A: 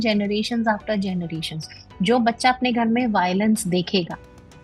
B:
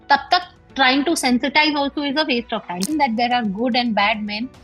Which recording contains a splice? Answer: B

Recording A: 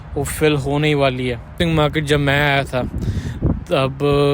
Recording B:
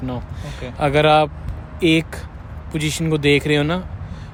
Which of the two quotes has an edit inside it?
A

